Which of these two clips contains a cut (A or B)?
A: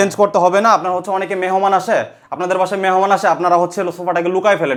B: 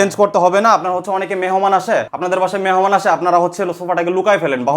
B